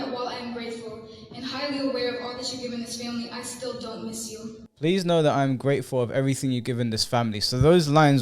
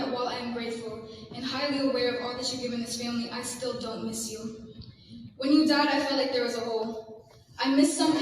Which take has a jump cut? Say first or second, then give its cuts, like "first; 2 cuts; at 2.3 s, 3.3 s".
second; 1 cut; at 4.6 s